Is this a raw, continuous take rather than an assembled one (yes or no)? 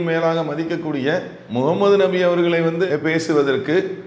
no